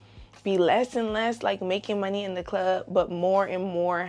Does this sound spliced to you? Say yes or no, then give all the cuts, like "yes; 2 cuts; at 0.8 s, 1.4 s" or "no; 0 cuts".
no; 0 cuts